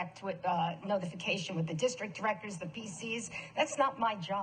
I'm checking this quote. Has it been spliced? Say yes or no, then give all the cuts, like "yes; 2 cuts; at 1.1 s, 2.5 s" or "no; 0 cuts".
yes; 1 cut; at 3.4 s